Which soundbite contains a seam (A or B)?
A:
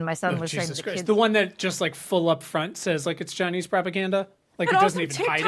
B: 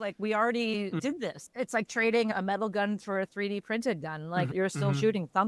B